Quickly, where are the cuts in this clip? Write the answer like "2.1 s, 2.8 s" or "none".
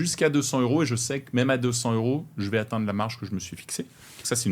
none